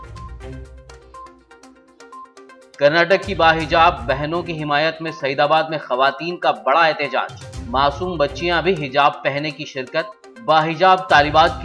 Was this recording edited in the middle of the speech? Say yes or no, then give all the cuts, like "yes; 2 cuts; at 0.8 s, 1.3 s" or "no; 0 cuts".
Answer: yes; 1 cut; at 2.1 s